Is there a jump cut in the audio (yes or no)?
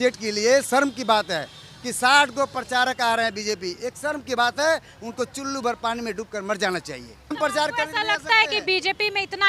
yes